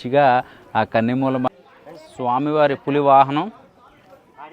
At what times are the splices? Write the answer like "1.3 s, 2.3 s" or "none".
1.5 s